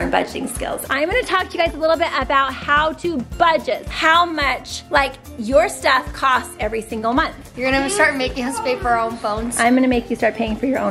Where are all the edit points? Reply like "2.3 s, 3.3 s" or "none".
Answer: 0.8 s, 3.9 s, 7.4 s